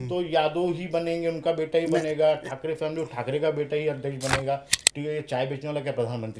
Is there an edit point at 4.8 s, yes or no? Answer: yes